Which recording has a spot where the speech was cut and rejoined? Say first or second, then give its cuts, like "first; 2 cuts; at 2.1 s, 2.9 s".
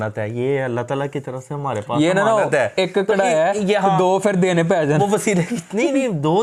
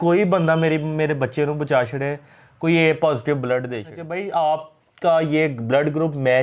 second; 1 cut; at 4.1 s